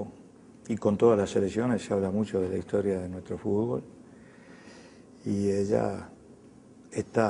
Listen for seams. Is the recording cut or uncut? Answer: uncut